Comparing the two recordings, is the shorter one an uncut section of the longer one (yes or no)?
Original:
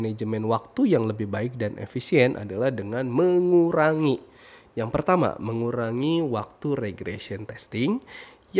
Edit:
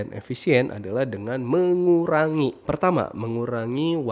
no